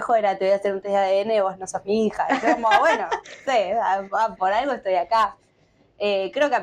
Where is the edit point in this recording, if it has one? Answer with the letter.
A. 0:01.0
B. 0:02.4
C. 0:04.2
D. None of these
D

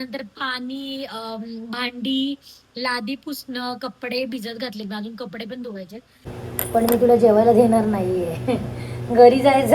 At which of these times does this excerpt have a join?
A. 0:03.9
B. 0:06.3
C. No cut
B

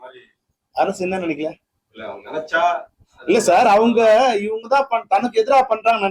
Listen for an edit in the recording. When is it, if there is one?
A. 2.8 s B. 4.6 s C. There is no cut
C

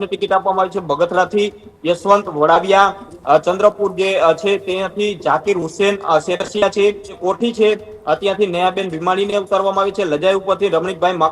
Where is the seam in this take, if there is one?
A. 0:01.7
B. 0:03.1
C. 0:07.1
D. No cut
C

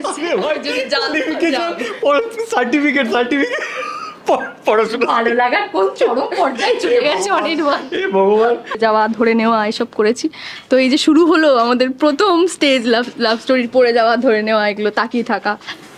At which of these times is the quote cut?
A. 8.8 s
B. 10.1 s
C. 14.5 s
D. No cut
A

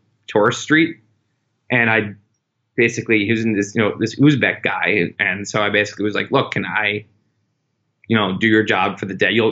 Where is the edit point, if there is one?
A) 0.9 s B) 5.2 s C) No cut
B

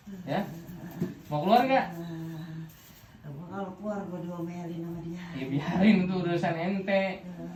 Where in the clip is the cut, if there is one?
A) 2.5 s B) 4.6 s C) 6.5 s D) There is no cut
D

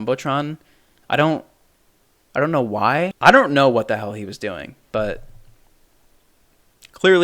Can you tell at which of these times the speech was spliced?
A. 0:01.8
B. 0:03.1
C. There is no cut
B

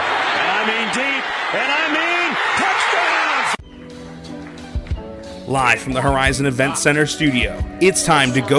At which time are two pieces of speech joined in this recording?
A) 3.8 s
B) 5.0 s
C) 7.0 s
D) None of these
D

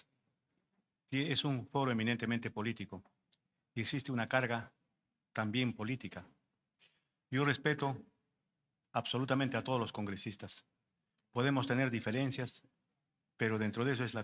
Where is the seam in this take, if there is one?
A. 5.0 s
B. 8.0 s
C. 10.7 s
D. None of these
D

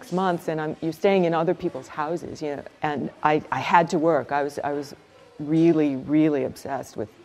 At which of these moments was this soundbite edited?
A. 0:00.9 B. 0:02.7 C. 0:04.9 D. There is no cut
B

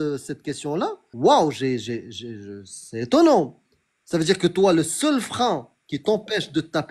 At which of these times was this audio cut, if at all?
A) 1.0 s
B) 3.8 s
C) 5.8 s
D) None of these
A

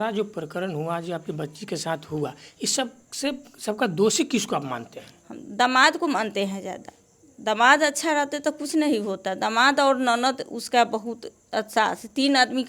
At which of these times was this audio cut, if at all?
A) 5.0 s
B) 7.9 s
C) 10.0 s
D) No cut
D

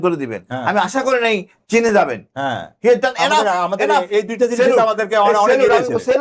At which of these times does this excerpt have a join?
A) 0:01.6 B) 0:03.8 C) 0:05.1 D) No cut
D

